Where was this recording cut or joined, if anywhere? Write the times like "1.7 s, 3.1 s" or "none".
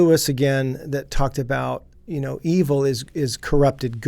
1.9 s